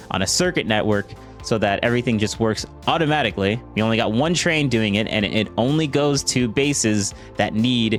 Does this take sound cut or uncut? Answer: uncut